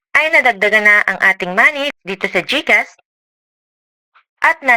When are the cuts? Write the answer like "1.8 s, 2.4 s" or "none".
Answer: 2.0 s